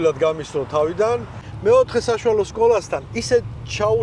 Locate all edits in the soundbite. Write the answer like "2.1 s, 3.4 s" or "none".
1.5 s

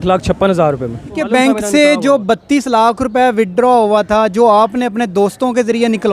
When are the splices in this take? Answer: 1.2 s

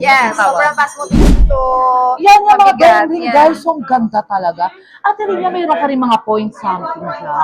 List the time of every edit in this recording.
1.4 s

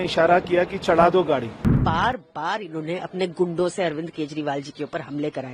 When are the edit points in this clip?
1.8 s

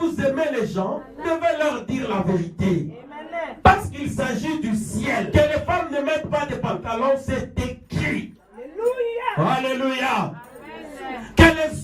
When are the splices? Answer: 1.2 s, 5.3 s

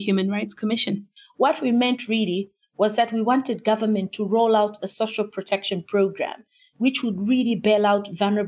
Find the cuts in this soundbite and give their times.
1.0 s

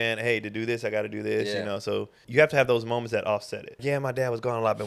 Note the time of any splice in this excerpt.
2.2 s, 3.8 s

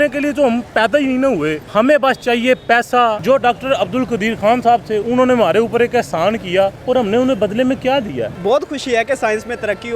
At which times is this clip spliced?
1.6 s, 3.2 s, 6.8 s, 8.3 s

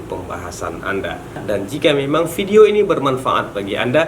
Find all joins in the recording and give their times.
1.4 s

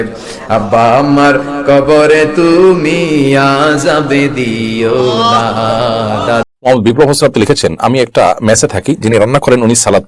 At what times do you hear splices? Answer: 6.4 s

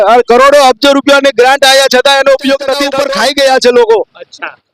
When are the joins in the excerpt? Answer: 2.9 s

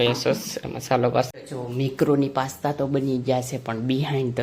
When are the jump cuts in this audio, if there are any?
1.3 s

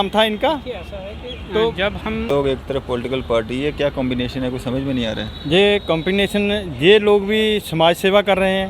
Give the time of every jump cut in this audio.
2.3 s

